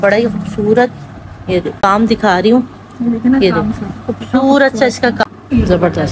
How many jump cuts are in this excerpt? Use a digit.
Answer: 2